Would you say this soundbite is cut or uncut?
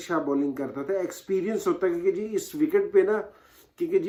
uncut